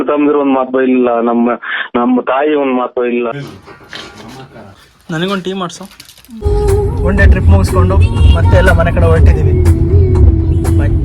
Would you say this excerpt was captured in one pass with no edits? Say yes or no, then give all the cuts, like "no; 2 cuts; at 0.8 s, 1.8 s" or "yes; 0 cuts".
no; 2 cuts; at 3.3 s, 6.4 s